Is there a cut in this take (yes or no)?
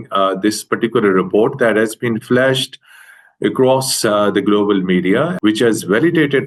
yes